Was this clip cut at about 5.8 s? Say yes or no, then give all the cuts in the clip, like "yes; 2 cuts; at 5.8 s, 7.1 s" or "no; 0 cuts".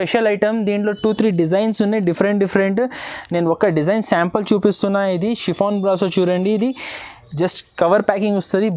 no; 0 cuts